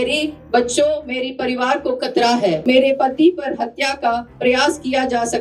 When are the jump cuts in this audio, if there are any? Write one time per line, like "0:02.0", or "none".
0:02.6

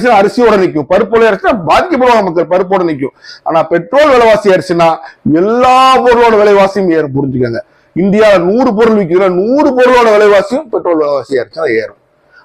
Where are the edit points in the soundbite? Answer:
none

